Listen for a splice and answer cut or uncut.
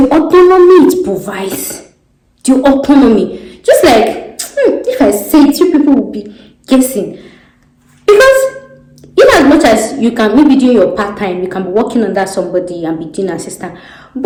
uncut